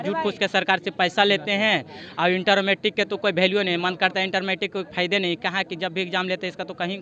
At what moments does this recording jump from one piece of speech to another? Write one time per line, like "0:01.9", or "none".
none